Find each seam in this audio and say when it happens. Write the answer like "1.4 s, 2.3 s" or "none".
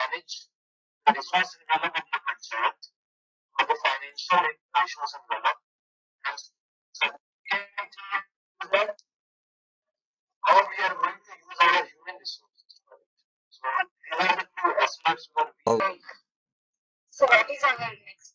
15.7 s